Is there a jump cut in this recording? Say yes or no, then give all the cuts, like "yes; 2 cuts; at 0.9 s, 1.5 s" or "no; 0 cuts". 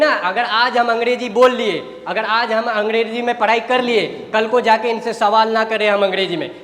no; 0 cuts